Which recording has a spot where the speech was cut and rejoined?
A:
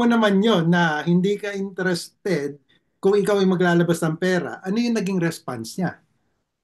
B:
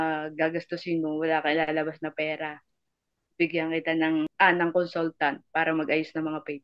B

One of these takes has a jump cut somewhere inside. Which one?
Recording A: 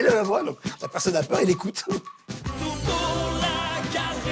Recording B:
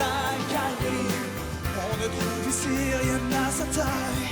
A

